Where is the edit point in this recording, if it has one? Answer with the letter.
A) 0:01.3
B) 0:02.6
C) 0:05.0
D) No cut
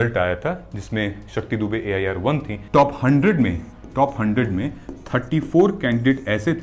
B